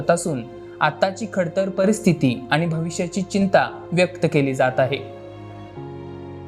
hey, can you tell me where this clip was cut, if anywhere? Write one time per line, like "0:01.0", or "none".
none